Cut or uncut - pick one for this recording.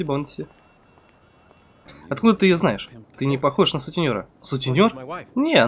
cut